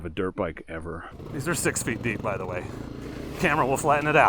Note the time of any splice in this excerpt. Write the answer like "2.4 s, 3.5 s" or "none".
1.1 s

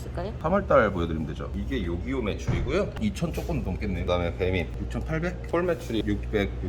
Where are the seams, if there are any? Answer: 4.0 s, 5.4 s

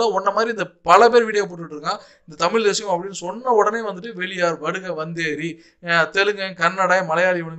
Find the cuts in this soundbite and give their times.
none

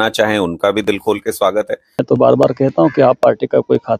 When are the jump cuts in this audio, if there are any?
2.0 s

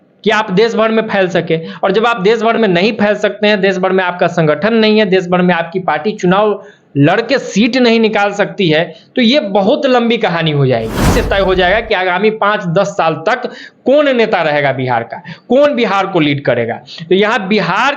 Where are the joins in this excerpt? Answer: 11.2 s

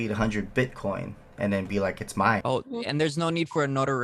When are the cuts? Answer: 2.4 s

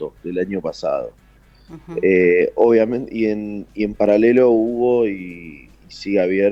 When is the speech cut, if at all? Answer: none

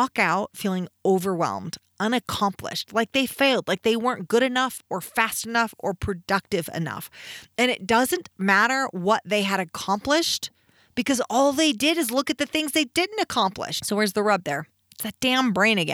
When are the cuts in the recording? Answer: 13.7 s

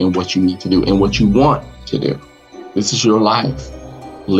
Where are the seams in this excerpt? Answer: 1.7 s

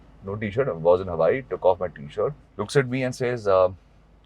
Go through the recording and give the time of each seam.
2.5 s

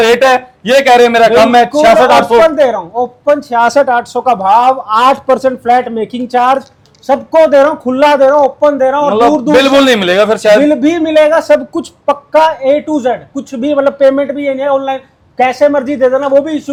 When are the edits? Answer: none

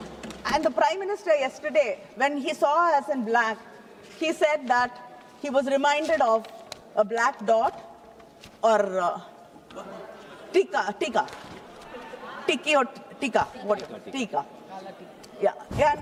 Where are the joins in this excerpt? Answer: none

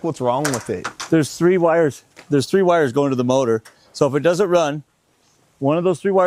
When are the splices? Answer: none

